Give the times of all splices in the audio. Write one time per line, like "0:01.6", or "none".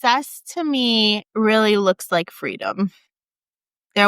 0:01.2